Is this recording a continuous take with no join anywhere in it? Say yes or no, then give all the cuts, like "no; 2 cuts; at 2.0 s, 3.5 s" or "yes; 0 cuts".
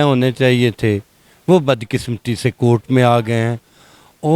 yes; 0 cuts